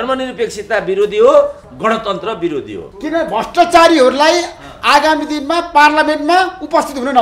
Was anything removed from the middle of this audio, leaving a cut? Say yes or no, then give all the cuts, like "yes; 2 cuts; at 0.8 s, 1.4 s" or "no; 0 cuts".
yes; 1 cut; at 2.8 s